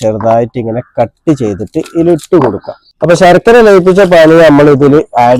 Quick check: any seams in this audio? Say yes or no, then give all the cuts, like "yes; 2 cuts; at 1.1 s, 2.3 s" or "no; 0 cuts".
yes; 1 cut; at 3.0 s